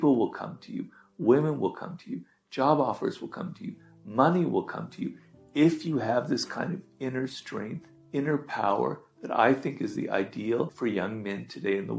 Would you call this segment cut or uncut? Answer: cut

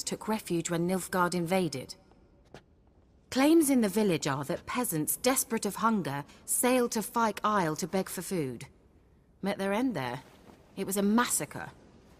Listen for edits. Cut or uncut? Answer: uncut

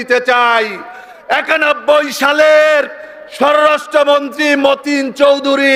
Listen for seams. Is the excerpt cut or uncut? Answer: uncut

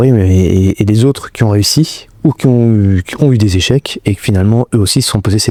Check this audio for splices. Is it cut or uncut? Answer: uncut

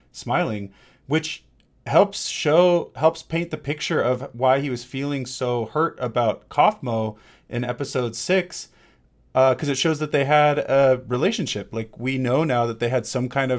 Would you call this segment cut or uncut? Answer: uncut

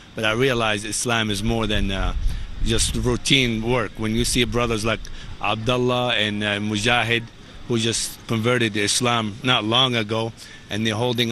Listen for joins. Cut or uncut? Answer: uncut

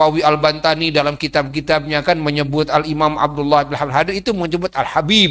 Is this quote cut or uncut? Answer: uncut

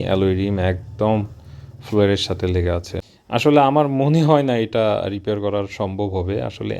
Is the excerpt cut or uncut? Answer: cut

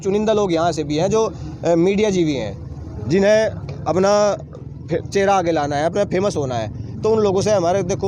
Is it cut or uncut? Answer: uncut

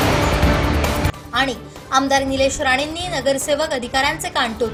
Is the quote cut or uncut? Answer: uncut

